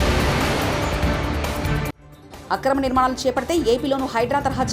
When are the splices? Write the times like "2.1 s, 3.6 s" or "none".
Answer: none